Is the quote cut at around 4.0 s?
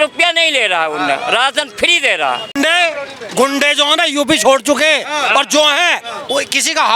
no; 1 cut; at 2.5 s

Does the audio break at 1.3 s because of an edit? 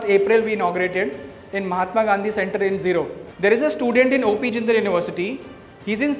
no; 1 cut; at 3.2 s

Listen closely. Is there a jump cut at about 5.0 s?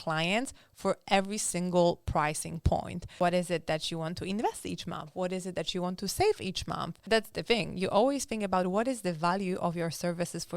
no; 2 cuts; at 3.0 s, 6.9 s

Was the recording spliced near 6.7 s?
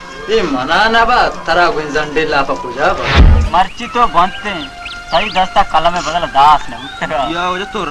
no; 1 cut; at 3.4 s

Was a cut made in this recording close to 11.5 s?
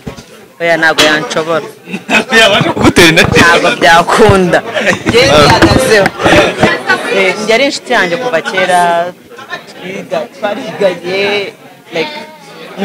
no; 1 cut; at 6.7 s

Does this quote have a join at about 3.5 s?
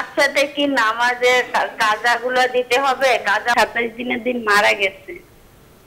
yes; 1 cut; at 3.5 s

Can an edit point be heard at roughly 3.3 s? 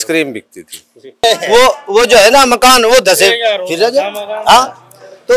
no; 1 cut; at 1.2 s

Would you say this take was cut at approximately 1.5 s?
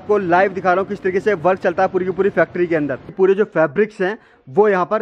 no; 1 cut; at 3.1 s

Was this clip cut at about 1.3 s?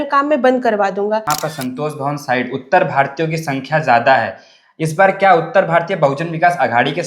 yes; 1 cut; at 1.3 s

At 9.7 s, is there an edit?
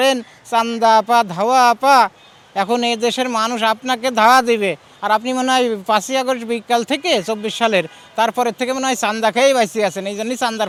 no; 0 cuts

